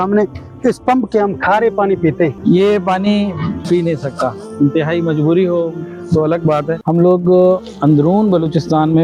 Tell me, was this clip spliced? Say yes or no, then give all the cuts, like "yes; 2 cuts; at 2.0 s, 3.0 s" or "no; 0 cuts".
yes; 2 cuts; at 2.4 s, 6.8 s